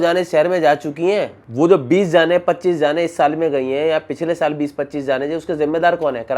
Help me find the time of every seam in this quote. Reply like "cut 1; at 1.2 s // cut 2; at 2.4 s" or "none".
none